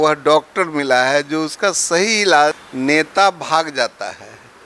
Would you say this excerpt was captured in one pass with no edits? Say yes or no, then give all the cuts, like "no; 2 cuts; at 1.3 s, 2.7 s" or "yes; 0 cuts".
no; 1 cut; at 2.7 s